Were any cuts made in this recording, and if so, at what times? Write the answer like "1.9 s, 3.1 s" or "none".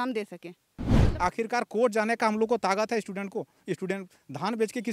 1.1 s